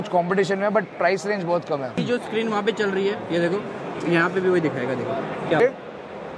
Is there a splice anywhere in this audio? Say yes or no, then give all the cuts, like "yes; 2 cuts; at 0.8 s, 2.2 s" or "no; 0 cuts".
yes; 2 cuts; at 2.0 s, 5.6 s